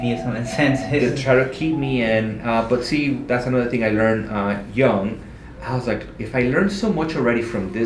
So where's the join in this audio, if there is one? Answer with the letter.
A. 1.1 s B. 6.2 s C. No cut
C